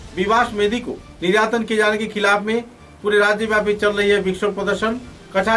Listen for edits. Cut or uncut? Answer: uncut